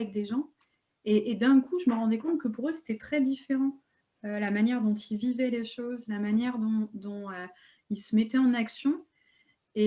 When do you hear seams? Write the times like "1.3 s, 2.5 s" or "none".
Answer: none